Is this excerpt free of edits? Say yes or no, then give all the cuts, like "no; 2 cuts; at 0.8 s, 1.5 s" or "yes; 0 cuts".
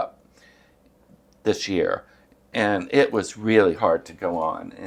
yes; 0 cuts